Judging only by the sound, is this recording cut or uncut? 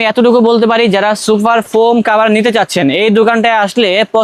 uncut